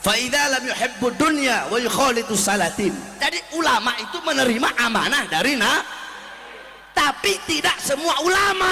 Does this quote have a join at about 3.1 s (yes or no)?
yes